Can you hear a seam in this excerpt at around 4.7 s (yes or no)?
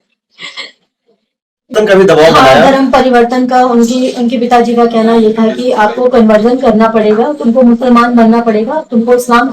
no